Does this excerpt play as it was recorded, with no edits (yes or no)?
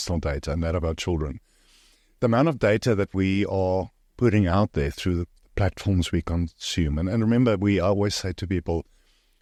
yes